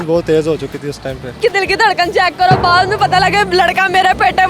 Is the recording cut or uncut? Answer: cut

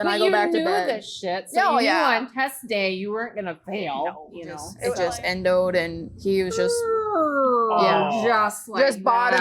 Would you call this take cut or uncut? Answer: cut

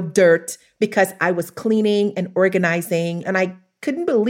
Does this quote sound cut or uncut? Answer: cut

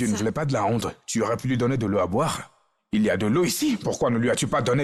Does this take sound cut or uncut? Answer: uncut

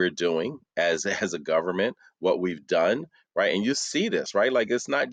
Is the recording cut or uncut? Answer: uncut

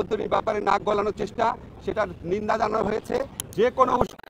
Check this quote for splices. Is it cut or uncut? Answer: cut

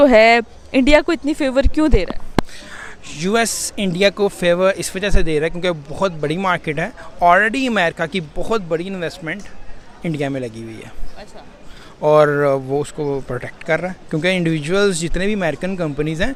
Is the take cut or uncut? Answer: uncut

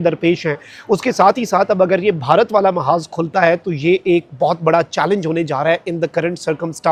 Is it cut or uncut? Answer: uncut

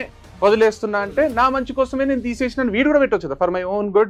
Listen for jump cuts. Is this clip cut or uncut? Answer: uncut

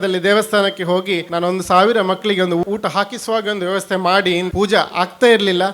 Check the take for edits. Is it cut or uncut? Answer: cut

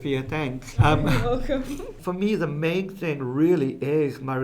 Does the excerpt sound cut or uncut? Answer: cut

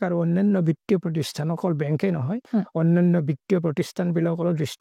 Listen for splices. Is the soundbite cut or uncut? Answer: uncut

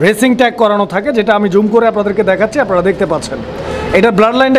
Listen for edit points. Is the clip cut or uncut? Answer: uncut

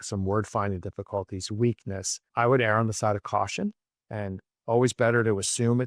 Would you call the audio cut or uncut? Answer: cut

